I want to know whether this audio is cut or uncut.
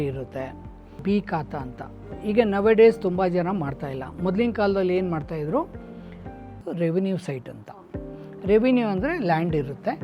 cut